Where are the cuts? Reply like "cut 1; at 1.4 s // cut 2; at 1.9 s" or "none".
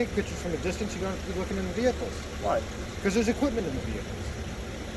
none